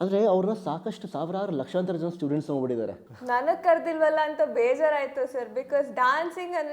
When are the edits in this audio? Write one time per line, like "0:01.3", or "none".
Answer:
0:03.0